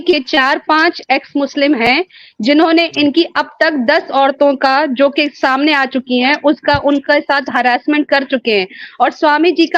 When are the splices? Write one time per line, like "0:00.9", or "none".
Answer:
none